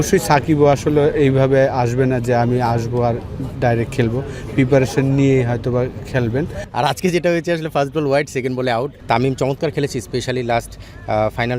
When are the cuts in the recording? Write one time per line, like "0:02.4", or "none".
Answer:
0:06.6
0:09.0

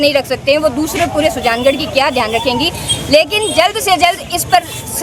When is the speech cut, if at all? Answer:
none

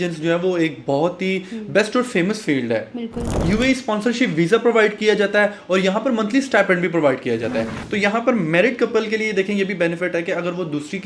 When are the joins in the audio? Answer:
0:03.3
0:07.8

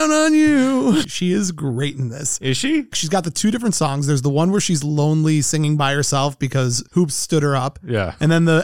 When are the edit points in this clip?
0:01.1
0:03.0

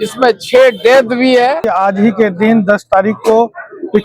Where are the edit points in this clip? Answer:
0:01.7

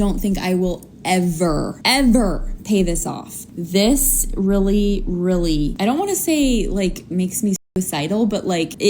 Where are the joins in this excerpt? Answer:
0:03.4

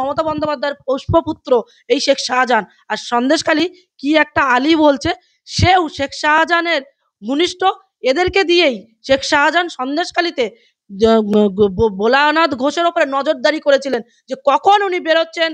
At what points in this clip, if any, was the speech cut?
none

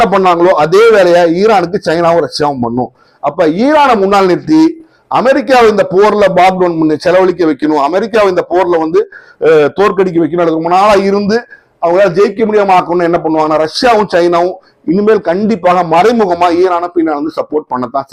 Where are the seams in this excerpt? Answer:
none

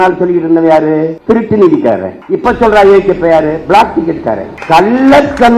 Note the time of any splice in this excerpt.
0:01.1
0:02.1
0:04.5

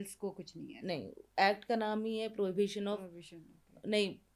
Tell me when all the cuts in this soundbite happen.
none

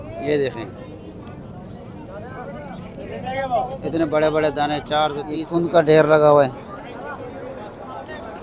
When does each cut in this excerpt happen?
0:05.3

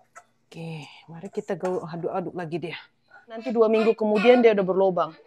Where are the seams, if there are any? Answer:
0:03.5

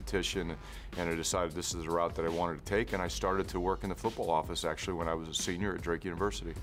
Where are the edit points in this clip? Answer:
none

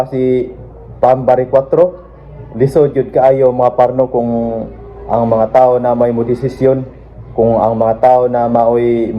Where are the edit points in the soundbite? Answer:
none

